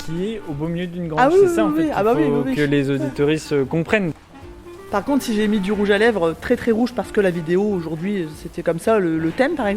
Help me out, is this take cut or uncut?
cut